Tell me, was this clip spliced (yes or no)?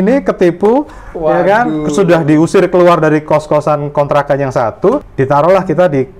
yes